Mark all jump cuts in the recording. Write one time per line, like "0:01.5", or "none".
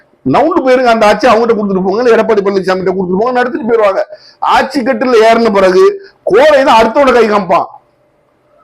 none